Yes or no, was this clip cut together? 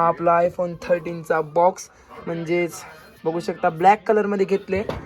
no